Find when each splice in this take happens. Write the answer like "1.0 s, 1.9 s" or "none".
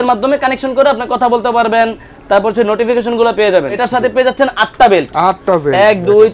3.8 s